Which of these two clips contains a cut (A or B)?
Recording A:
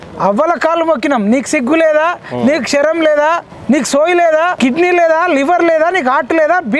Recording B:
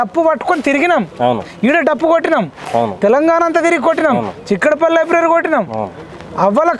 A